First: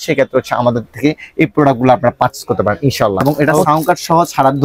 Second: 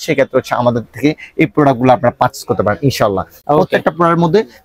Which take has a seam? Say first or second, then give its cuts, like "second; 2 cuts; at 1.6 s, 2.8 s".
first; 1 cut; at 3.2 s